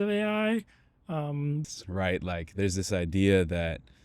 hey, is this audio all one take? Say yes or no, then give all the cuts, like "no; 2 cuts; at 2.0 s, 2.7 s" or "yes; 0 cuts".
no; 1 cut; at 1.6 s